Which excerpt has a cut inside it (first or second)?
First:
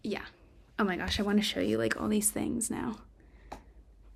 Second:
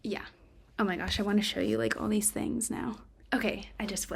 second